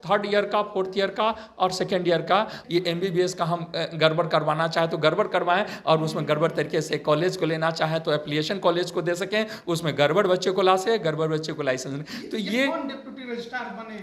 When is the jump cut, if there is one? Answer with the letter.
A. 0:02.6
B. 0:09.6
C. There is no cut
A